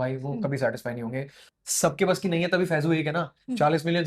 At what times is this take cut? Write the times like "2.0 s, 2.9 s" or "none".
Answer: 1.4 s